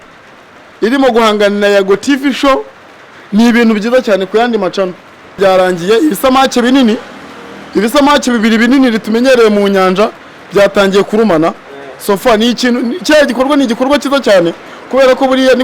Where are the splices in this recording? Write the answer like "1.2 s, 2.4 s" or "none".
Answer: 5.4 s